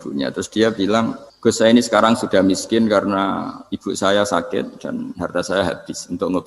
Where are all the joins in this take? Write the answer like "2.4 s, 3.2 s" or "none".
1.2 s